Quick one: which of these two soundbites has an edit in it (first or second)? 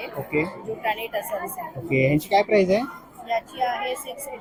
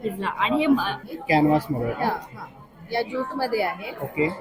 second